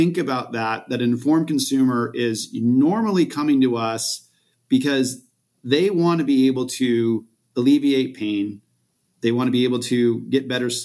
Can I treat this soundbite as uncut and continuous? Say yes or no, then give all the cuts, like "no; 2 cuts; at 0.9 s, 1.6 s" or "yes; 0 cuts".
yes; 0 cuts